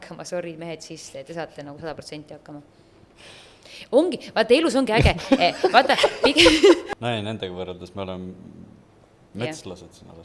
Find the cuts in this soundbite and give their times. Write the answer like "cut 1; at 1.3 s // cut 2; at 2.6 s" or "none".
cut 1; at 6.9 s